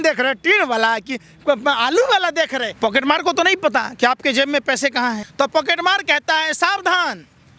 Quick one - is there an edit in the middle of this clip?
yes; 2 cuts; at 2.6 s, 5.2 s

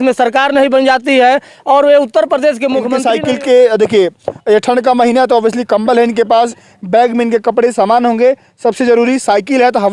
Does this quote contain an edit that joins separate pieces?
yes; 1 cut; at 2.9 s

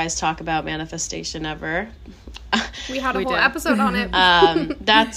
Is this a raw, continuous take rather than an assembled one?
yes; 0 cuts

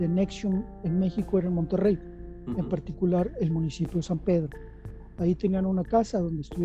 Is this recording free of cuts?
yes; 0 cuts

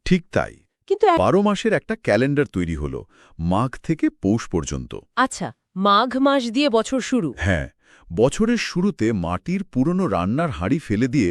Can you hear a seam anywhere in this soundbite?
yes; 1 cut; at 1.2 s

